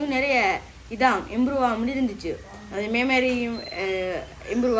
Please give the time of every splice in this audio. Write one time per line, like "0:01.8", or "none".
none

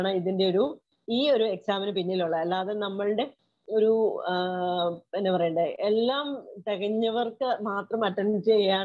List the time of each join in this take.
none

